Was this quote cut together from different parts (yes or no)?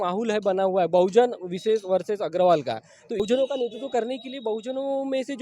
yes